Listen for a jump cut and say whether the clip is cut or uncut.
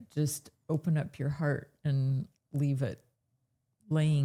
uncut